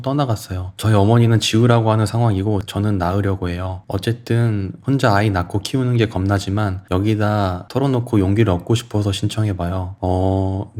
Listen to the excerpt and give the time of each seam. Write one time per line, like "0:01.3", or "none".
none